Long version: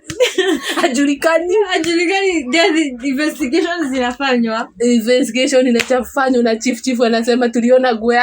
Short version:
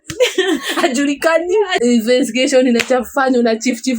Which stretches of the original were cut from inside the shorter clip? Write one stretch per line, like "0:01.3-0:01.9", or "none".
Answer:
0:01.7-0:04.7